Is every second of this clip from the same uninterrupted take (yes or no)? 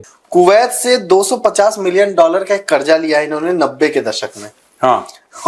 yes